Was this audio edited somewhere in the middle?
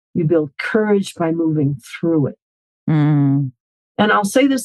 yes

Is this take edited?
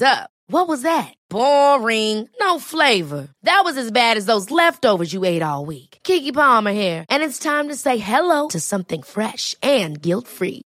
no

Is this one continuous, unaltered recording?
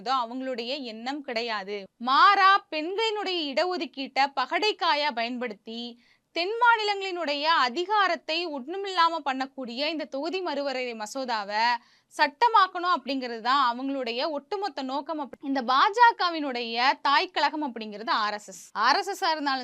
no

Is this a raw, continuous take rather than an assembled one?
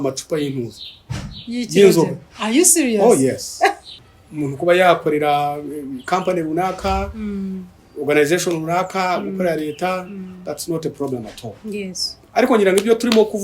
no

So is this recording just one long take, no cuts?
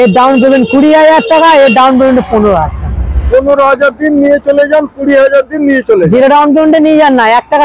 yes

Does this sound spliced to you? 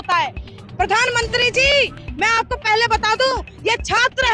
no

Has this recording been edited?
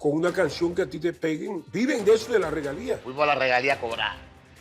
yes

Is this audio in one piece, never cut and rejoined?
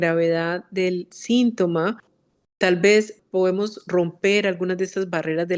no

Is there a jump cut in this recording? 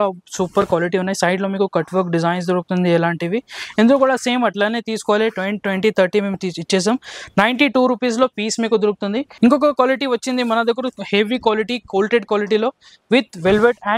yes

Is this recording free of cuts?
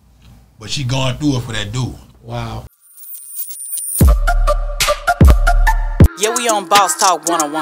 no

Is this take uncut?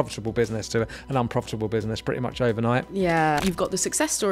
no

